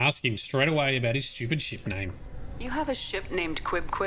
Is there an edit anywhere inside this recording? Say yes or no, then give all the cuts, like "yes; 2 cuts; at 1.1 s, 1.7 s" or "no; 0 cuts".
no; 0 cuts